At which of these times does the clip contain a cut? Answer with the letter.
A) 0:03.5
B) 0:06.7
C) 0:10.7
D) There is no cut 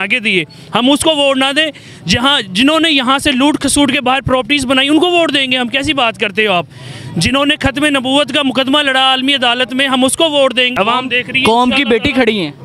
C